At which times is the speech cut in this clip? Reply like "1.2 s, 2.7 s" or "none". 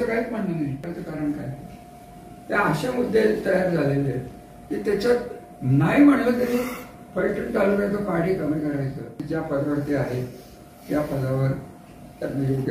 0.9 s, 9.2 s